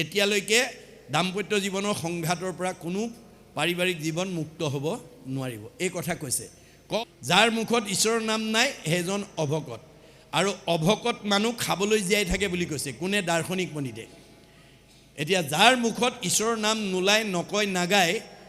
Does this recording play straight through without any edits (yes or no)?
no